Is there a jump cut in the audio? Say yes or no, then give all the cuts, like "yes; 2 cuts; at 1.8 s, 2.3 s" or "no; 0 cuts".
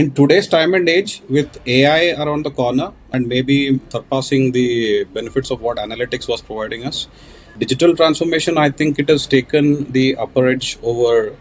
yes; 3 cuts; at 3.0 s, 3.9 s, 7.5 s